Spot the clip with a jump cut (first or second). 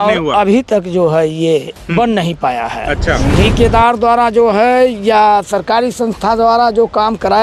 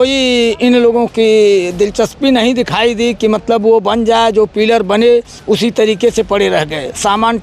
first